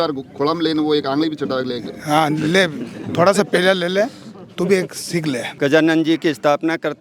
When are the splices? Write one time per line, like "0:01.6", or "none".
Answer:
0:05.5